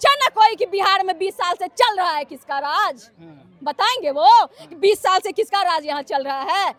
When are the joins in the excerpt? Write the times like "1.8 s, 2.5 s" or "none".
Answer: none